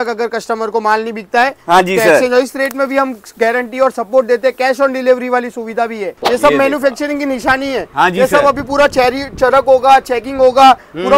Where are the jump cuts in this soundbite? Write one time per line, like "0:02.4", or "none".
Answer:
0:06.2